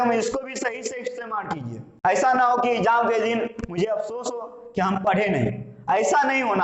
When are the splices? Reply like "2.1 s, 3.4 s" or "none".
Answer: 1.8 s